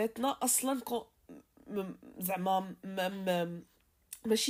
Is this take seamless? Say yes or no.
yes